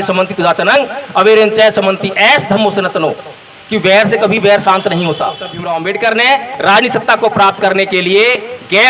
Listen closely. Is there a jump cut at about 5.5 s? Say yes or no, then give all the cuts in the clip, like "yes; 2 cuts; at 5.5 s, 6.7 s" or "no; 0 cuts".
yes; 1 cut; at 5.5 s